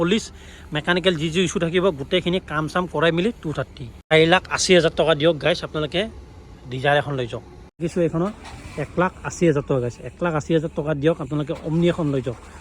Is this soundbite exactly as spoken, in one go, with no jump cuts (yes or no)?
no